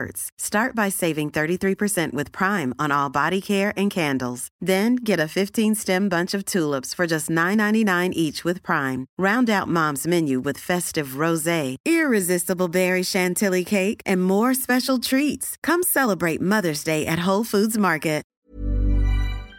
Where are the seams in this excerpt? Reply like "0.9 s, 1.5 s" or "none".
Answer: 18.3 s